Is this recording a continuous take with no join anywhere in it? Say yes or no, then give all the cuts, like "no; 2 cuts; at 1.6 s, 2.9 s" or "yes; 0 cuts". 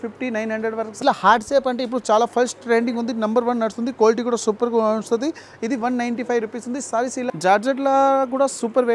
no; 2 cuts; at 1.0 s, 7.3 s